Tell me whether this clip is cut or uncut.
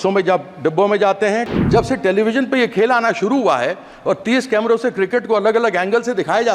cut